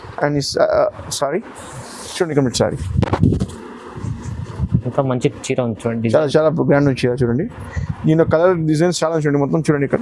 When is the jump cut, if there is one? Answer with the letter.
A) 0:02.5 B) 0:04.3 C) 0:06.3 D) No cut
D